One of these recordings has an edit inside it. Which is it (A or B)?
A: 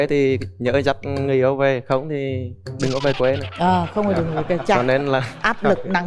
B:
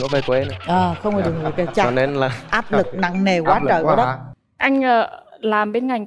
B